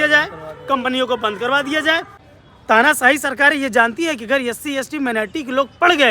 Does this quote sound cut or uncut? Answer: cut